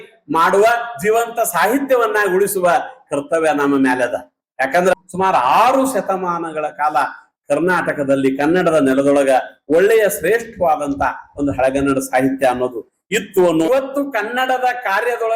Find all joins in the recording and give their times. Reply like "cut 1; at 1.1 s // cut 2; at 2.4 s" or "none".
cut 1; at 4.9 s // cut 2; at 13.7 s